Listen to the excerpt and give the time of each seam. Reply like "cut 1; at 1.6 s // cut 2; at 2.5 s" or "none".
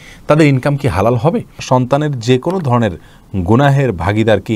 cut 1; at 1.6 s